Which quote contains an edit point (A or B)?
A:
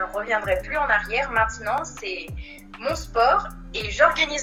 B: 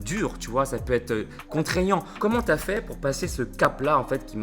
B